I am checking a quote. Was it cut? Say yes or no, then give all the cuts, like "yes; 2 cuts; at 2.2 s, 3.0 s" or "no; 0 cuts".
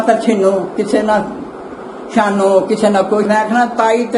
yes; 1 cut; at 3.3 s